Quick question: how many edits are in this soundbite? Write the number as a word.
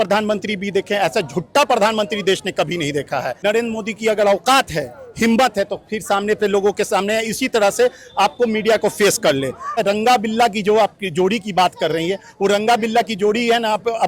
two